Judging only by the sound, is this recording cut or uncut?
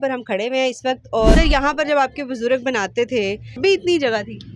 cut